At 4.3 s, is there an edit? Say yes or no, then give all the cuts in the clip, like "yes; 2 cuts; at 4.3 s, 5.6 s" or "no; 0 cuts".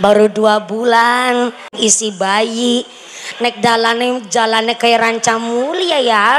no; 1 cut; at 1.7 s